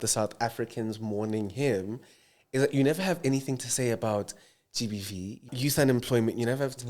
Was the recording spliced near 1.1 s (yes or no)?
no